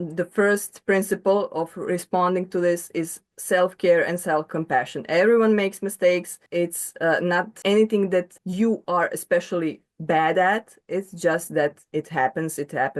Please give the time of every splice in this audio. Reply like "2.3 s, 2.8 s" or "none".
4.5 s, 6.4 s, 7.5 s, 8.4 s